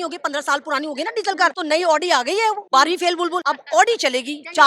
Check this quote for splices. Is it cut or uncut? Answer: cut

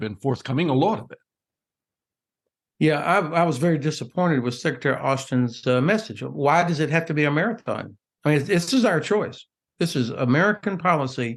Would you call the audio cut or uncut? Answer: uncut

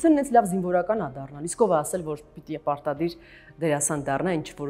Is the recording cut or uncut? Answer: uncut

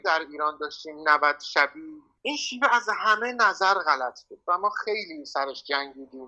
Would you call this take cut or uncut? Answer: cut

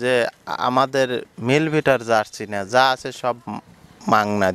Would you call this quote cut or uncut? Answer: uncut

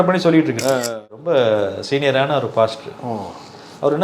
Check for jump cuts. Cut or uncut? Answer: cut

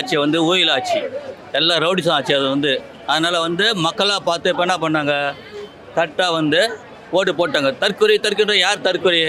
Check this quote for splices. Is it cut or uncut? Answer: uncut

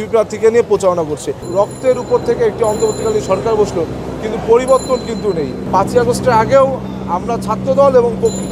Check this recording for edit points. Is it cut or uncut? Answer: cut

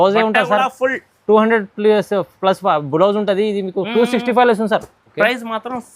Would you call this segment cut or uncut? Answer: cut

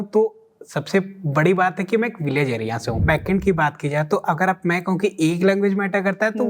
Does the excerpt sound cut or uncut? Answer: cut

